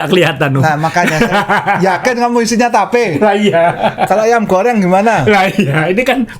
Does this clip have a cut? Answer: no; 0 cuts

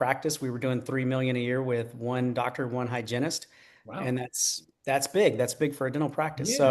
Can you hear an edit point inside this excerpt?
no; 0 cuts

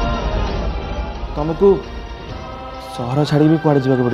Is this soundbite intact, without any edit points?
yes; 0 cuts

